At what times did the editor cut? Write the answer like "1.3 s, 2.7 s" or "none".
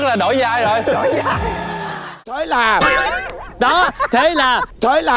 2.2 s